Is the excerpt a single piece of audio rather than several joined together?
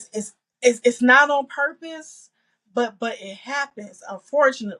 yes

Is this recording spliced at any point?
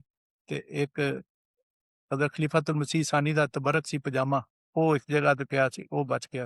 yes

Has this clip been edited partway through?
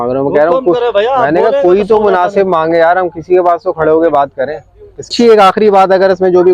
yes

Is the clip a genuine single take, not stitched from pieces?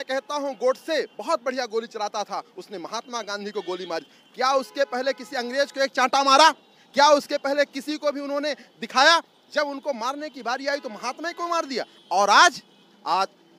yes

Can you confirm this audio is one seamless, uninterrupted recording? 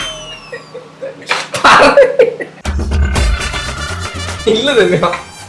no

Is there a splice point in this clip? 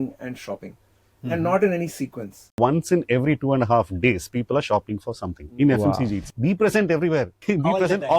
yes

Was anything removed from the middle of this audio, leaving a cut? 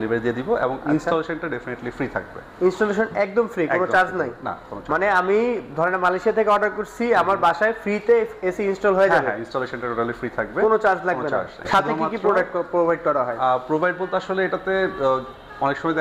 no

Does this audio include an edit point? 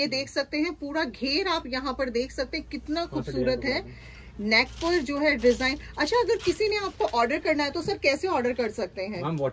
no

